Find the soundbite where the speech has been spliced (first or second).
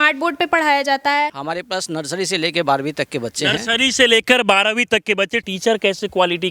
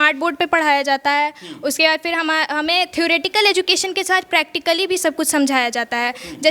first